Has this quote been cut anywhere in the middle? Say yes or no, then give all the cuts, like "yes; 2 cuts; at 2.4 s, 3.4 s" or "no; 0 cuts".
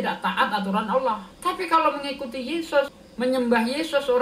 yes; 2 cuts; at 1.3 s, 3.0 s